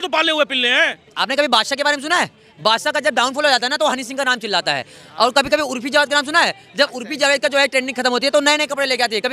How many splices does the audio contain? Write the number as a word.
one